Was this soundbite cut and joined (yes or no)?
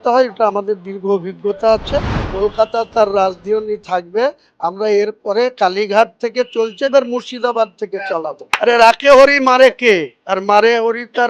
yes